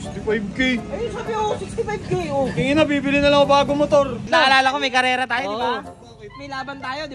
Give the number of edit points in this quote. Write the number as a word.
one